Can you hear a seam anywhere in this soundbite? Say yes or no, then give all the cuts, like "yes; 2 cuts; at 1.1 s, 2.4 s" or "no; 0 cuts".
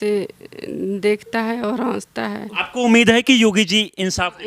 yes; 1 cut; at 2.6 s